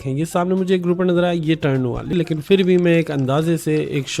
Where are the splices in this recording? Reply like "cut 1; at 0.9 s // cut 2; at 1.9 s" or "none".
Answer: cut 1; at 2.1 s